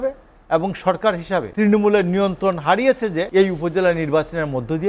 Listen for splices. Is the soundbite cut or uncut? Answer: cut